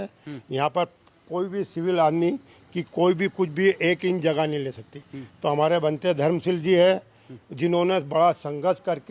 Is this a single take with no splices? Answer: yes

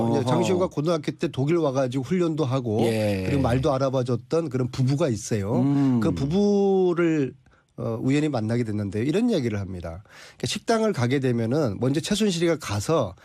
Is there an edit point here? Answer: yes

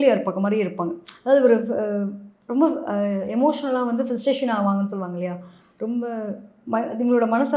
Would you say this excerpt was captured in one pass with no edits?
yes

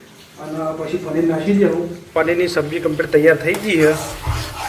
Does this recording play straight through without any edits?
no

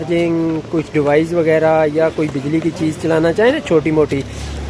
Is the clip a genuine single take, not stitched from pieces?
yes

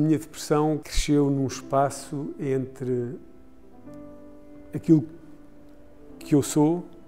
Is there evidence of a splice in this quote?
yes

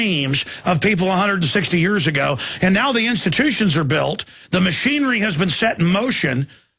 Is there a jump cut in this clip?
no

